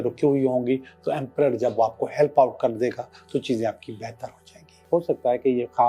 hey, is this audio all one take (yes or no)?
no